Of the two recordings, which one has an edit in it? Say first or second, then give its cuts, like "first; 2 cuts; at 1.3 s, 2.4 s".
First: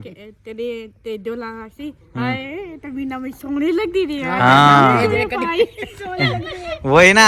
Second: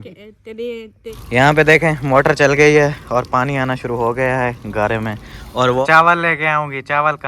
second; 2 cuts; at 1.1 s, 5.8 s